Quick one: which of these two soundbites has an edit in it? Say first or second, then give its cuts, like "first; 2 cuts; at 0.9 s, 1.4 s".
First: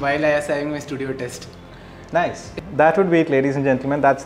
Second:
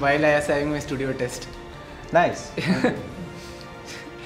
first; 1 cut; at 2.5 s